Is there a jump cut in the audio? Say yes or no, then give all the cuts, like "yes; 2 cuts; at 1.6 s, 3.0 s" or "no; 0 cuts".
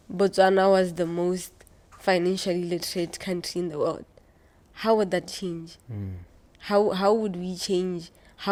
no; 0 cuts